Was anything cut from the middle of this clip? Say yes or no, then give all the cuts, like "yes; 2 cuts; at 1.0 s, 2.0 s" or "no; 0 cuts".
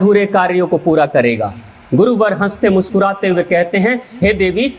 no; 0 cuts